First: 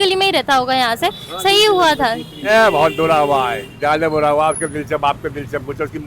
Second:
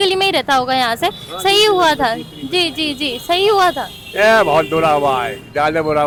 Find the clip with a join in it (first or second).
first